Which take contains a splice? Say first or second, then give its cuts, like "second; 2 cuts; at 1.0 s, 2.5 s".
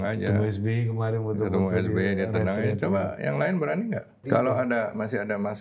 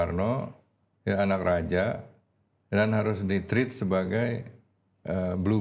first; 1 cut; at 4.1 s